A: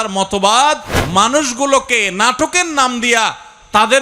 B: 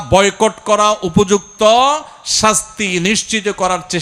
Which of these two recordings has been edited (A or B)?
A